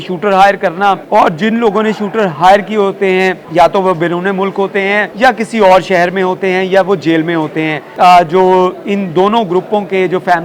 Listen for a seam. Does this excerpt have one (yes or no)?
yes